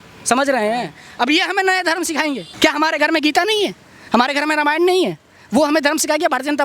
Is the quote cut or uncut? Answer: cut